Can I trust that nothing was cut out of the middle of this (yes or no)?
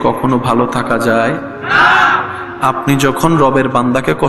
yes